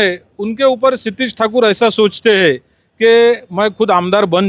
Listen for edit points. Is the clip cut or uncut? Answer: uncut